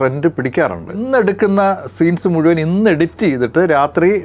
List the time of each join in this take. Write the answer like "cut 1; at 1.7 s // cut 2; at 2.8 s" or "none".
cut 1; at 1.0 s